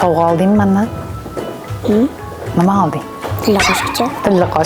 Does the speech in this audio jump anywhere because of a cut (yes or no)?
no